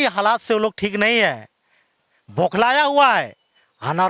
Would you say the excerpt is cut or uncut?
uncut